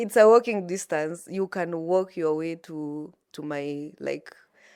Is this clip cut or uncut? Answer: uncut